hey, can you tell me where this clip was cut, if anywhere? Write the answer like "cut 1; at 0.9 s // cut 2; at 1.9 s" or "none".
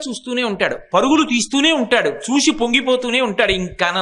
none